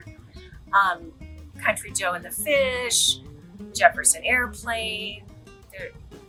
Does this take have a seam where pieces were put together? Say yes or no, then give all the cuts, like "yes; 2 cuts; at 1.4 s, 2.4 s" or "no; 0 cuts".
no; 0 cuts